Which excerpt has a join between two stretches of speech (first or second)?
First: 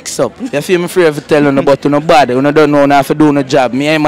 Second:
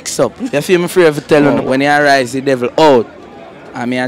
second